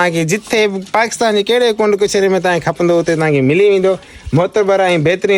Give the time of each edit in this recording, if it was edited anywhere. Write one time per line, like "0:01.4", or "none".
none